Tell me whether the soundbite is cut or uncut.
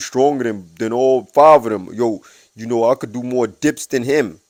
uncut